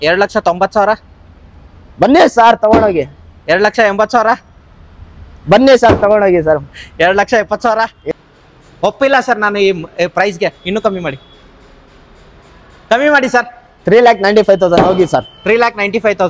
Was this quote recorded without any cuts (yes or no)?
no